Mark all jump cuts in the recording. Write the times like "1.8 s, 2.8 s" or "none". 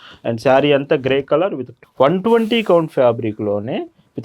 1.7 s